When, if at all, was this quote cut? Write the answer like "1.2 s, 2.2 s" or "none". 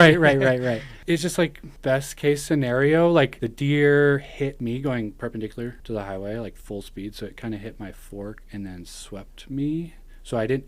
0.9 s, 1.7 s, 3.4 s, 4.6 s, 5.8 s